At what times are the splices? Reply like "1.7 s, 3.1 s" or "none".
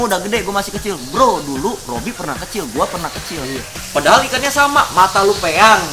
3.8 s